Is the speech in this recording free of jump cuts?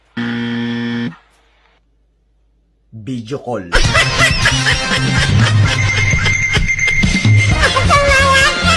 yes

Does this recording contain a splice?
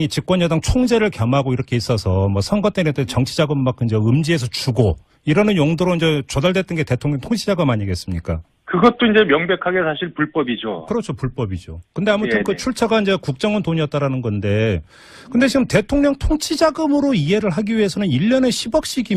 no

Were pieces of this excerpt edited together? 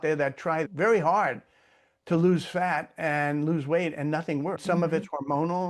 yes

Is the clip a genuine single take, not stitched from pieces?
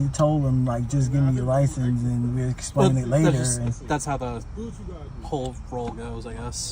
yes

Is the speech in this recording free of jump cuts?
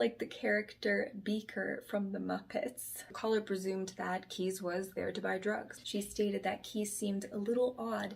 no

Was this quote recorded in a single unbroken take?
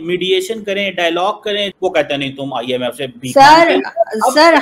no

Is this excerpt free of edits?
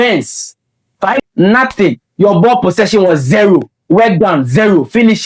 no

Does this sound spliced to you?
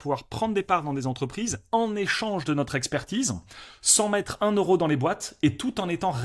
no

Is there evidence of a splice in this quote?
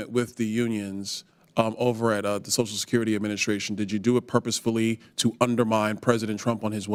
no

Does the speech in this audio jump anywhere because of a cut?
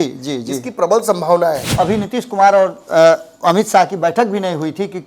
yes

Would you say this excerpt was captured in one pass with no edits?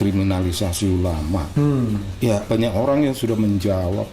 no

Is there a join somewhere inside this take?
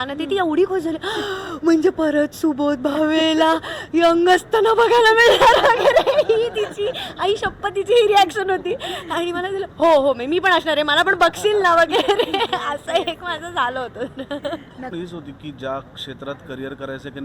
yes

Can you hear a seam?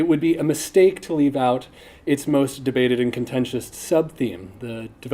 yes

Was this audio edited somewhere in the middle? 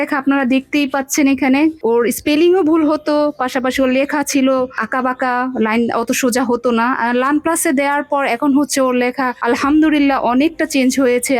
no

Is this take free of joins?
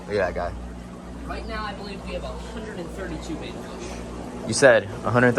yes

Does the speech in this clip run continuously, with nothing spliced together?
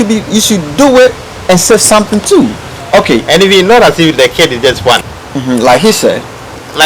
no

